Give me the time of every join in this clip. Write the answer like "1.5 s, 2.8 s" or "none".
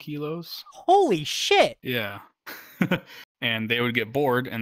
3.2 s